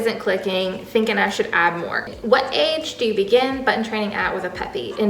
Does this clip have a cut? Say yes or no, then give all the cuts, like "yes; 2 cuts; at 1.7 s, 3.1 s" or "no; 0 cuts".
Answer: yes; 1 cut; at 2.0 s